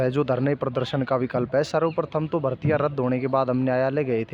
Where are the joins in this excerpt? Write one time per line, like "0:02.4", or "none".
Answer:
none